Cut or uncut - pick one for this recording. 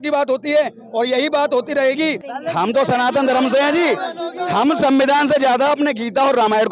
cut